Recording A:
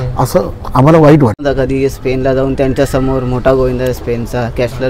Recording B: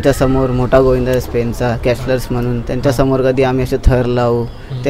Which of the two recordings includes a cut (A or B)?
A